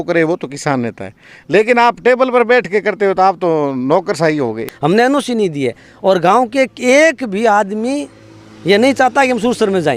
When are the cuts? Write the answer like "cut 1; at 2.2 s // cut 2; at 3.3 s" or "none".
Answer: cut 1; at 4.7 s